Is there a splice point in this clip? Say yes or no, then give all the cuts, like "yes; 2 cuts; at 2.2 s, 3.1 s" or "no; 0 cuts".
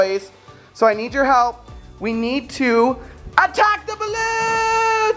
no; 0 cuts